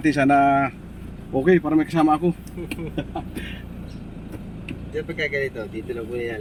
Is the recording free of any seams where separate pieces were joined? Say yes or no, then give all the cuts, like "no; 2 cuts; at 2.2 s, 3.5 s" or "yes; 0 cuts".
yes; 0 cuts